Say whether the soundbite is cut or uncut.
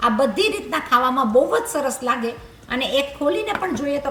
uncut